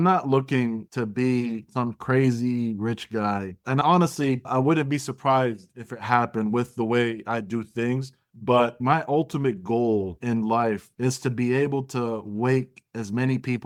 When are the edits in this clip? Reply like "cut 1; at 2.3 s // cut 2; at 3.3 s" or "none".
none